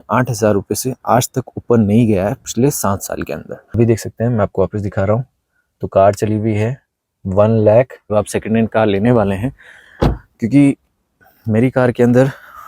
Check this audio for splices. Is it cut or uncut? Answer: cut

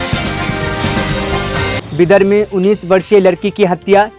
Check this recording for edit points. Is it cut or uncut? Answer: cut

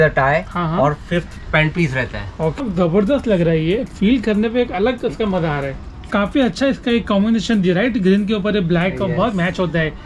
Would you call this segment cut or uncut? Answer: cut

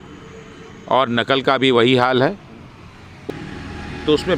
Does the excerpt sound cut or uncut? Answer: cut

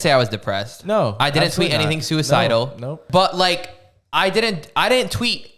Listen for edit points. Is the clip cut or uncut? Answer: cut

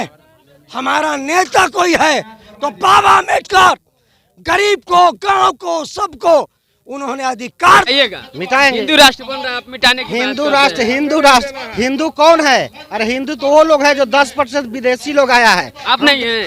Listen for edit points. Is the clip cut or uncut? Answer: cut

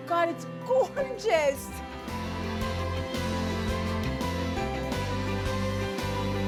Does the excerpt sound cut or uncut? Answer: uncut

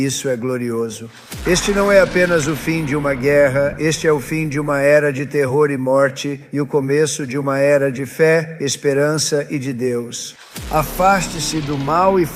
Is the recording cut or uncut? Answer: cut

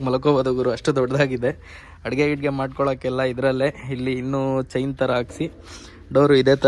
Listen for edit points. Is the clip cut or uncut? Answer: uncut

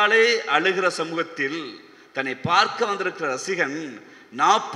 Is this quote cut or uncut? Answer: uncut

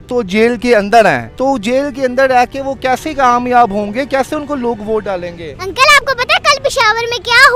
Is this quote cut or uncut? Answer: cut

